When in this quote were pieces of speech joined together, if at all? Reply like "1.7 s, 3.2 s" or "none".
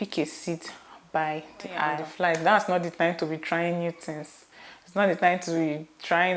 2.1 s